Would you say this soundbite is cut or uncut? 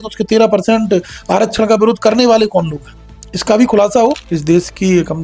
cut